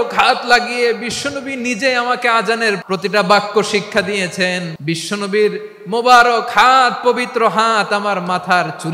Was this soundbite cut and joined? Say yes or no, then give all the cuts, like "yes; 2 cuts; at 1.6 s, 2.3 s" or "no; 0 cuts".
yes; 2 cuts; at 2.8 s, 4.7 s